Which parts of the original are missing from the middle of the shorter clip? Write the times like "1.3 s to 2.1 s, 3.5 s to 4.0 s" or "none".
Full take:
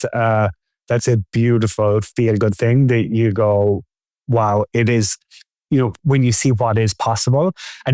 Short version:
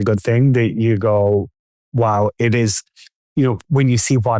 none